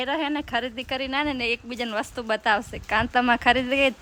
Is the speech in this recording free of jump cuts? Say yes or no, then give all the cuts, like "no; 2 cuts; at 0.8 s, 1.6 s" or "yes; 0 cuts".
yes; 0 cuts